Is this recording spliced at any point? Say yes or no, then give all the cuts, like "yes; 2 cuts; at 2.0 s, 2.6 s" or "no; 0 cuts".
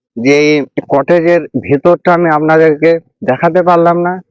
no; 0 cuts